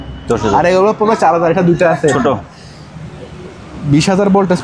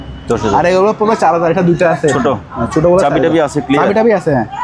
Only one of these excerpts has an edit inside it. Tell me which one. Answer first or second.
first